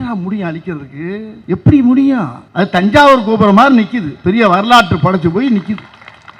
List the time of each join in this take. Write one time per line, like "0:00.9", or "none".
0:01.3
0:02.4